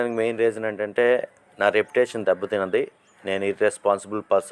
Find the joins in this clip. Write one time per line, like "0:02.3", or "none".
none